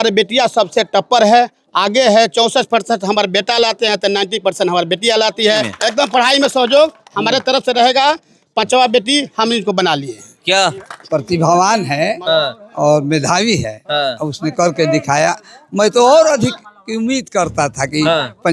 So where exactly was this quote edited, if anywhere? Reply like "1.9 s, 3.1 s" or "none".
5.7 s, 10.9 s